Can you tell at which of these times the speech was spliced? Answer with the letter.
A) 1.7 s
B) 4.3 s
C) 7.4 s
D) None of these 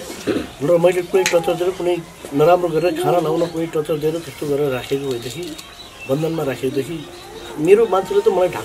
D